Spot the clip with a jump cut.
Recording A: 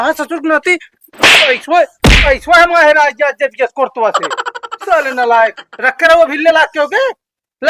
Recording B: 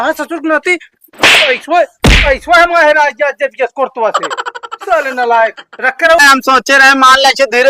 B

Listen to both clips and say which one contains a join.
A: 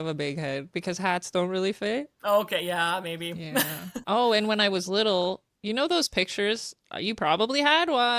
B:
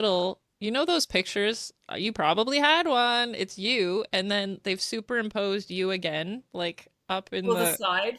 A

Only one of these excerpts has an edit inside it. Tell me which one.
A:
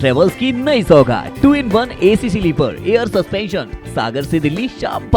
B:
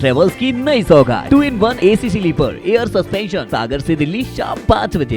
B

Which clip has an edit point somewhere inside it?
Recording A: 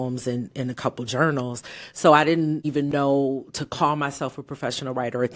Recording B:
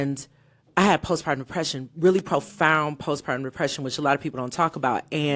A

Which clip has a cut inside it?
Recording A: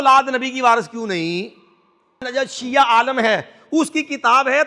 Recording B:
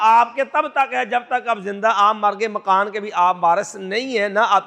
A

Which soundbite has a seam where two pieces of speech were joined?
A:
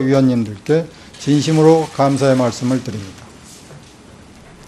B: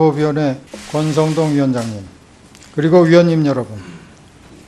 A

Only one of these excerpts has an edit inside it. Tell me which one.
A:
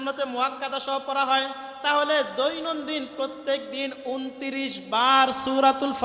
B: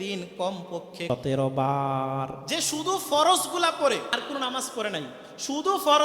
B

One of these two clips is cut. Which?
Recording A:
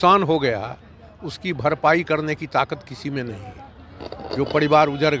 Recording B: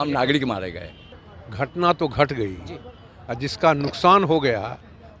B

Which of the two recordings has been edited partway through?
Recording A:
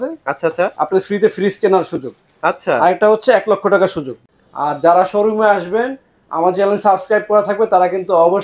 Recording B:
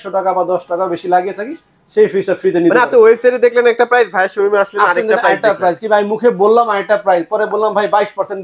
A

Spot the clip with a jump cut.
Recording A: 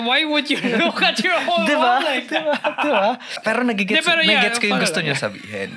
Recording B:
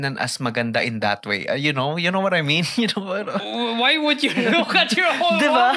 A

